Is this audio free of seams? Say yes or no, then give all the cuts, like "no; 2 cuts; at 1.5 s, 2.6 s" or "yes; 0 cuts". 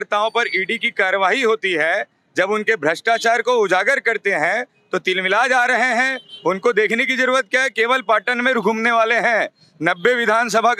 yes; 0 cuts